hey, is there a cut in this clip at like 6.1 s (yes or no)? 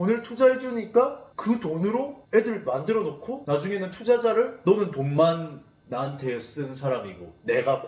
no